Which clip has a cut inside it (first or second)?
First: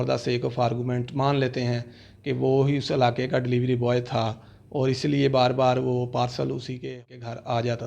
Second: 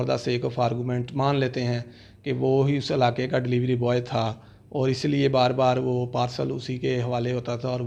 first